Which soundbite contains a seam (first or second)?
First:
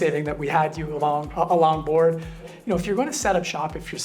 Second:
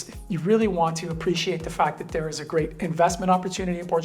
first